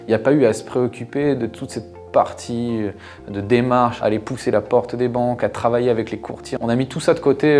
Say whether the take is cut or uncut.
cut